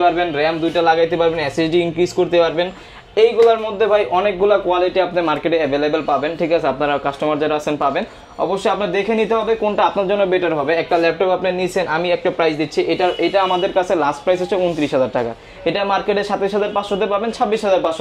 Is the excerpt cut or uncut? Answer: uncut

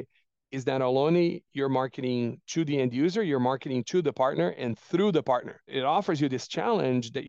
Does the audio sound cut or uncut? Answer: uncut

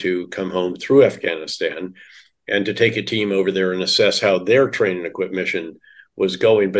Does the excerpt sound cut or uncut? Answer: uncut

